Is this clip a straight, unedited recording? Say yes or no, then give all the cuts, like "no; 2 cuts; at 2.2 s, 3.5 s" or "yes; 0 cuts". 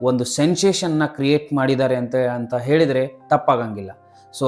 yes; 0 cuts